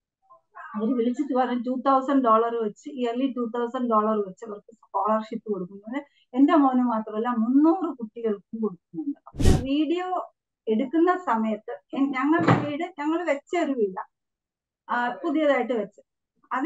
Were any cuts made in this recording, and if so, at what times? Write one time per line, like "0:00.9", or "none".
0:09.4